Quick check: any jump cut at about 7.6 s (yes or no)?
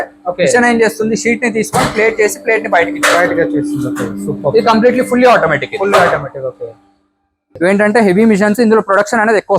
yes